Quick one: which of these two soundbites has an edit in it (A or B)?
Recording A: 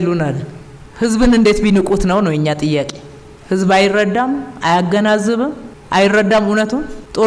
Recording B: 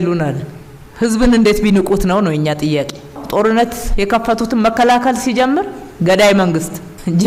B